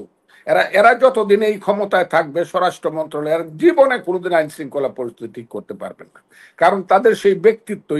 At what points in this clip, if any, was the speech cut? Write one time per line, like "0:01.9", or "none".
none